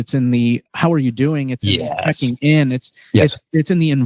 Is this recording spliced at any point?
no; 0 cuts

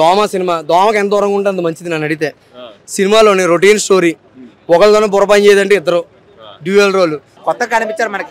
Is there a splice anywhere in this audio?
yes; 1 cut; at 7.3 s

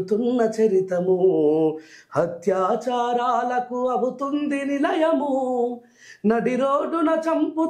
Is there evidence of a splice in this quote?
no; 0 cuts

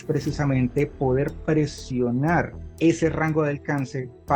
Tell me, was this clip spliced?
yes; 1 cut; at 2.6 s

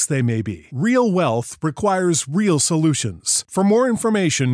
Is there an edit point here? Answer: no; 0 cuts

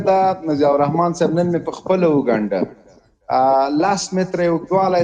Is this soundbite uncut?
yes; 0 cuts

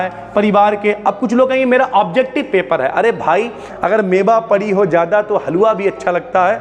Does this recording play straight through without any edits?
no; 1 cut; at 3.6 s

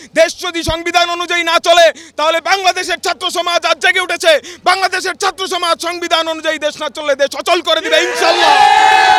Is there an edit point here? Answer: no; 0 cuts

